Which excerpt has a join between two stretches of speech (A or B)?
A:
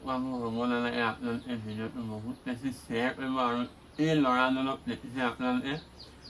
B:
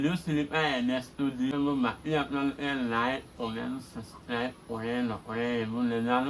B